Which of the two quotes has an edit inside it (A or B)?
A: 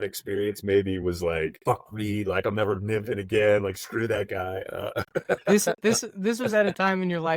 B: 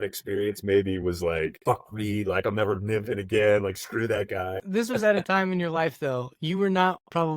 B